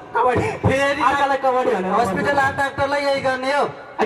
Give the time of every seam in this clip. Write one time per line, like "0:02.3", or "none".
none